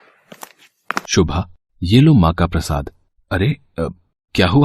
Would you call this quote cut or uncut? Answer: cut